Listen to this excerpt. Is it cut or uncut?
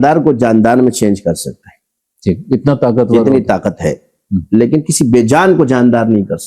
uncut